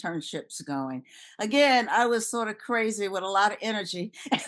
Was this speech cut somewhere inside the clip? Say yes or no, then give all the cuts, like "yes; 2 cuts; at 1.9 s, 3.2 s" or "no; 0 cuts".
no; 0 cuts